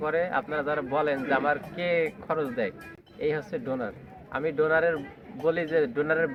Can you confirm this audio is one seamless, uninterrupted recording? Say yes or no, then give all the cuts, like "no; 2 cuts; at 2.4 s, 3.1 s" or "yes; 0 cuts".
yes; 0 cuts